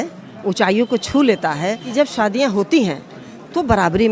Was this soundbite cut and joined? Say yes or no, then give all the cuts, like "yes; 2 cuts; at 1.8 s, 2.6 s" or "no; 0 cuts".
yes; 1 cut; at 1.8 s